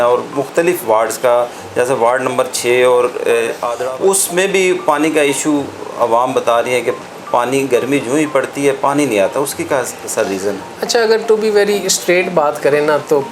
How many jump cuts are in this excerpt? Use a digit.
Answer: 1